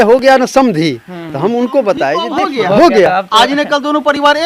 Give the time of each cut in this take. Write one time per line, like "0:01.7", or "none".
0:02.3